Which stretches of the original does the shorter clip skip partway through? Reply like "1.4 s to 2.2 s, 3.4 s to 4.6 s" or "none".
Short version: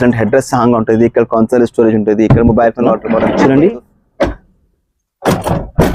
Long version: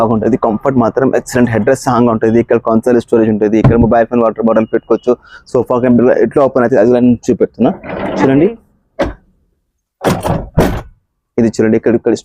4.6 s to 8.0 s